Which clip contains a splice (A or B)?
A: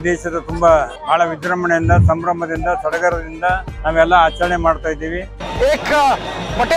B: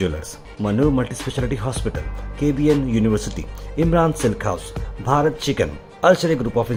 A